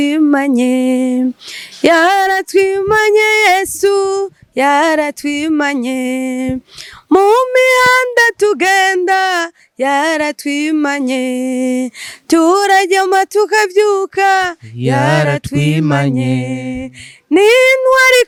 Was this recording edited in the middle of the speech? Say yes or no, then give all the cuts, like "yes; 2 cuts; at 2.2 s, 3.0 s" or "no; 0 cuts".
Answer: no; 0 cuts